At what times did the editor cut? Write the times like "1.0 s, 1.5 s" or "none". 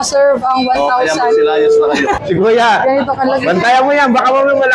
2.2 s